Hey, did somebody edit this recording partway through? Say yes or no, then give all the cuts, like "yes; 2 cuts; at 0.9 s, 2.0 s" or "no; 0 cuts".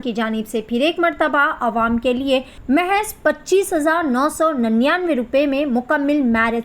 yes; 1 cut; at 2.5 s